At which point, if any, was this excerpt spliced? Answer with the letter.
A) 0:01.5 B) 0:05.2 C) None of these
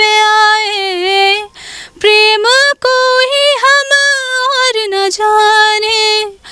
C